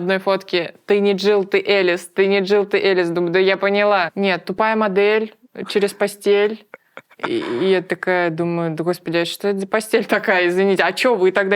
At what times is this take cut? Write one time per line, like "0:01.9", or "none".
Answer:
0:04.1